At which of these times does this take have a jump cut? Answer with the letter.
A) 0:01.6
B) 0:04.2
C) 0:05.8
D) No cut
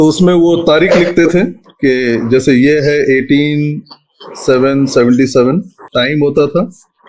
C